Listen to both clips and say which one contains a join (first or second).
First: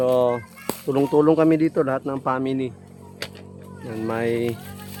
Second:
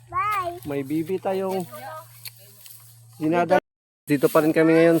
second